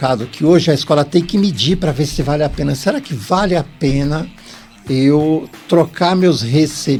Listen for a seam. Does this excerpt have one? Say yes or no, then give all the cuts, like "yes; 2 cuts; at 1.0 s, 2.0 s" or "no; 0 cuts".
no; 0 cuts